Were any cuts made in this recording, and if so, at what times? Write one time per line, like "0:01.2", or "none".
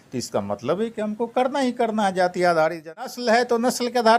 0:03.1